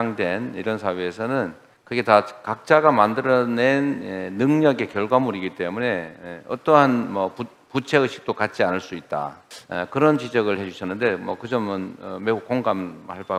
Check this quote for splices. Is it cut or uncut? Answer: uncut